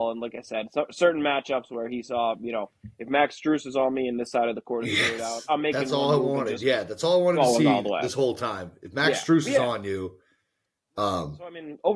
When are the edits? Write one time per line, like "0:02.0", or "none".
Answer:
none